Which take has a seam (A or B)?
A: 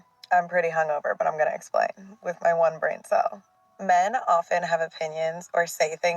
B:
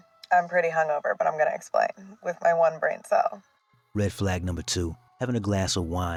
A